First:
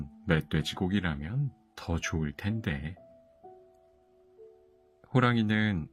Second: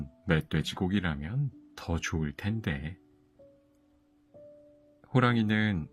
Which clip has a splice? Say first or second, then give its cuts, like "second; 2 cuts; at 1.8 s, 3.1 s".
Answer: second; 2 cuts; at 3.0 s, 5.0 s